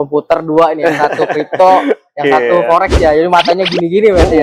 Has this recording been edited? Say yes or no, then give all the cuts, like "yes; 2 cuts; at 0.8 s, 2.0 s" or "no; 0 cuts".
no; 0 cuts